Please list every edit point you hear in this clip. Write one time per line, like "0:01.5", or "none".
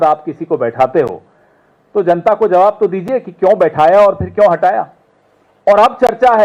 none